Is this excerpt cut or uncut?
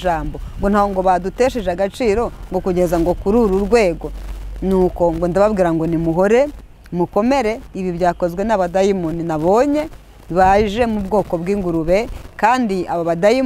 uncut